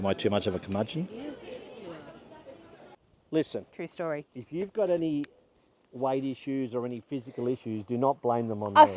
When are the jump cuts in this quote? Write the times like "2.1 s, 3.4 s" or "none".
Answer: 2.9 s